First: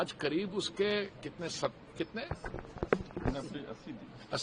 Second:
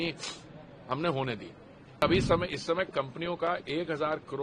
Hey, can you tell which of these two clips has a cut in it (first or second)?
second